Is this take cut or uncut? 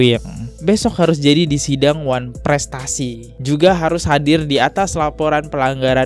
uncut